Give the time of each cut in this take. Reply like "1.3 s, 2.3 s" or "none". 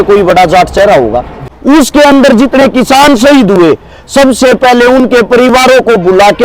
1.4 s